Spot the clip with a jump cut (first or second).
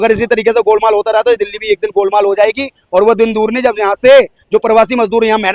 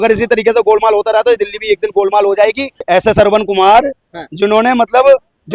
second